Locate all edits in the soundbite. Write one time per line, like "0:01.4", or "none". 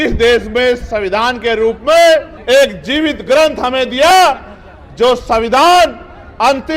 0:02.3